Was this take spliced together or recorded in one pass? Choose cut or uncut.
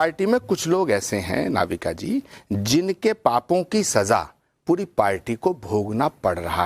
uncut